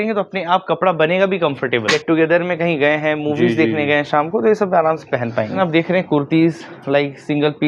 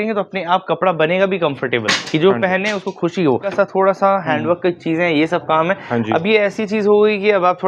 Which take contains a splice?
first; 2 cuts; at 2.0 s, 5.5 s

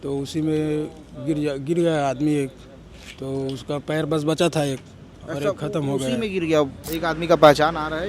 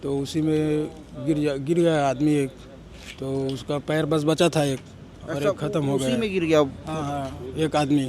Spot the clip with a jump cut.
first; 1 cut; at 6.8 s

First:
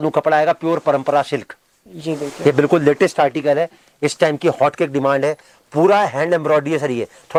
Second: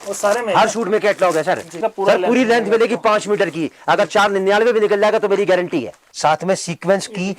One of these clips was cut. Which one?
second; 2 cuts; at 1.7 s, 6.1 s

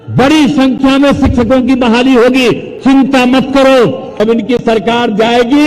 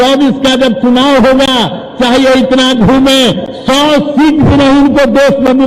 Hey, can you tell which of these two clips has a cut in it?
first; 1 cut; at 4.2 s

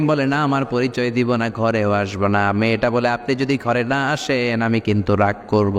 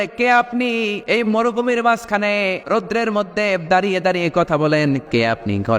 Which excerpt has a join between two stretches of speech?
second; 3 cuts; at 1.0 s, 2.6 s, 5.0 s

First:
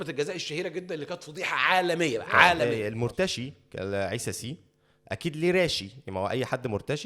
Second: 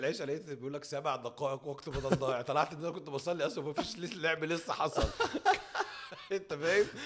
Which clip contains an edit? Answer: first; 1 cut; at 2.7 s

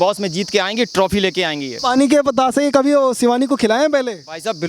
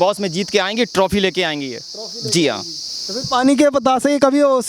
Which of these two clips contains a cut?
first; 1 cut; at 1.7 s

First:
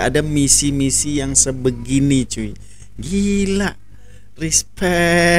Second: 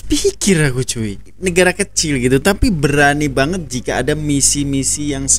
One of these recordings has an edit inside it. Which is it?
second; 1 cut; at 1.3 s

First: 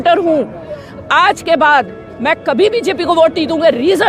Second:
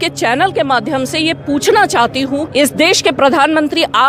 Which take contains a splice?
second; 1 cut; at 2.5 s

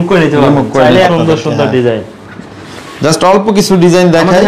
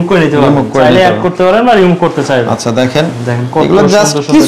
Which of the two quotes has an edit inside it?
first; 1 cut; at 1.1 s

